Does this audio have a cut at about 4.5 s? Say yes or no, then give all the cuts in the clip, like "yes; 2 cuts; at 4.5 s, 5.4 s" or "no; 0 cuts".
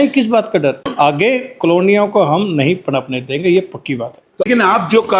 yes; 2 cuts; at 0.9 s, 4.5 s